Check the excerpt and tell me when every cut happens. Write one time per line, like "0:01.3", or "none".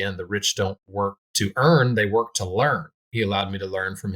0:01.2
0:03.0